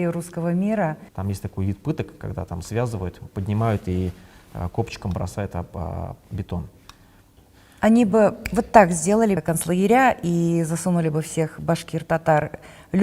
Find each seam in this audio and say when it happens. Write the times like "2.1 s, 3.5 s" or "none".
1.1 s, 7.3 s, 9.4 s